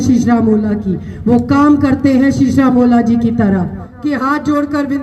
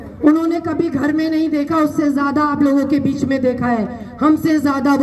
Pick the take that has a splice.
first; 1 cut; at 3.9 s

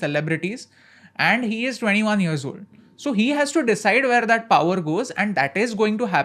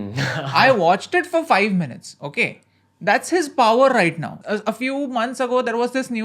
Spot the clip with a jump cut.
second; 1 cut; at 4.3 s

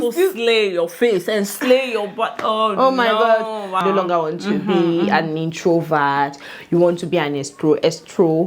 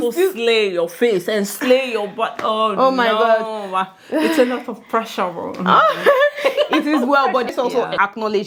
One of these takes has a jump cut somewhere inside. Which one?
first; 1 cut; at 3.8 s

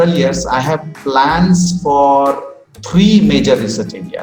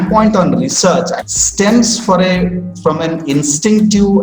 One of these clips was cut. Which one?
second; 1 cut; at 1.2 s

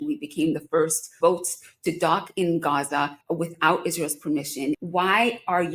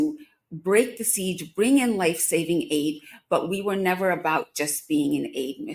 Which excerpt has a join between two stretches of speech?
first; 3 cuts; at 1.1 s, 3.2 s, 4.8 s

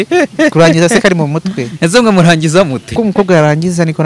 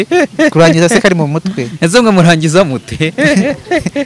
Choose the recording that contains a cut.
first; 1 cut; at 2.8 s

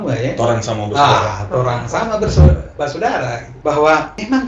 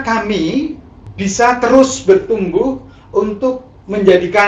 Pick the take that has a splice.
first; 1 cut; at 3.5 s

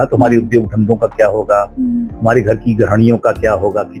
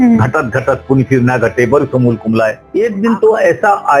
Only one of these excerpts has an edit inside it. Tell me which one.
second; 1 cut; at 2.6 s

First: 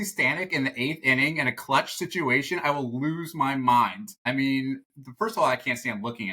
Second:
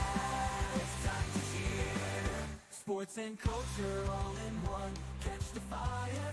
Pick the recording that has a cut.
first; 1 cut; at 4.1 s

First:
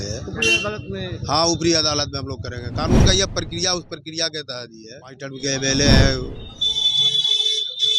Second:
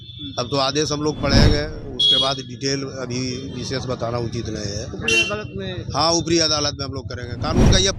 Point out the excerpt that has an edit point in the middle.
first; 1 cut; at 5.3 s

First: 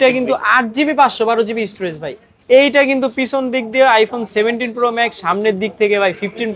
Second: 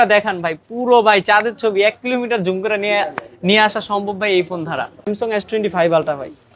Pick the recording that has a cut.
second; 1 cut; at 5.1 s

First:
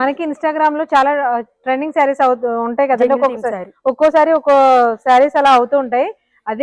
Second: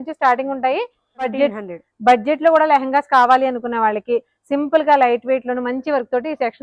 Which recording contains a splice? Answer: second; 1 cut; at 1.3 s

